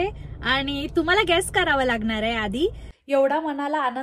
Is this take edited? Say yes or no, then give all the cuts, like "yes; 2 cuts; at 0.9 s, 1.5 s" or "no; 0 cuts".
yes; 1 cut; at 2.9 s